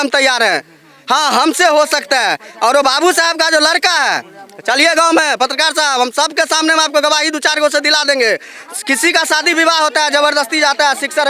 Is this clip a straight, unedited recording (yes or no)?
yes